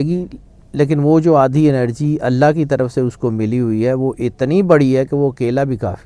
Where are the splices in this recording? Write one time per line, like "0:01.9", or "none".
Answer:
none